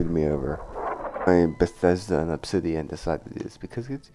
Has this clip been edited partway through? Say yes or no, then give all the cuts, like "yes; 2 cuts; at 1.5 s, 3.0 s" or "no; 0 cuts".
yes; 1 cut; at 1.3 s